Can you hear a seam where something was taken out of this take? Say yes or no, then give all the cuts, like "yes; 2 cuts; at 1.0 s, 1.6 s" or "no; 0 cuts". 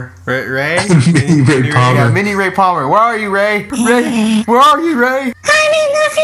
no; 0 cuts